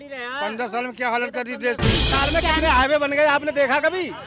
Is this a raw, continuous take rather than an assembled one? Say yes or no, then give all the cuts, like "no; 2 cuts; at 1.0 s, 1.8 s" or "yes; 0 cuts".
no; 1 cut; at 2.1 s